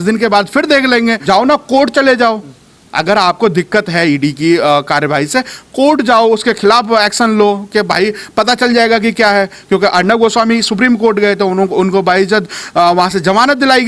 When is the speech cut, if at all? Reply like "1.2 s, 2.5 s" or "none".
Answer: 1.2 s